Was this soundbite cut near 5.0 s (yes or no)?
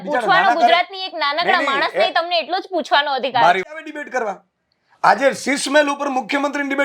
no